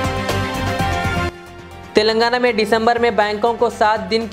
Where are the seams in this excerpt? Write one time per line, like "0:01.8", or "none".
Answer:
0:01.2